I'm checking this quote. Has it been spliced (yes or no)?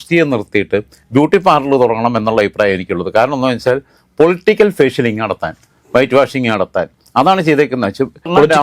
no